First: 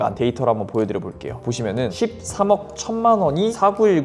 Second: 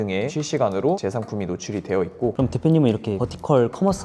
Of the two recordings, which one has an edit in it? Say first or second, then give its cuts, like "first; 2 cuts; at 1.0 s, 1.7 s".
second; 1 cut; at 2.3 s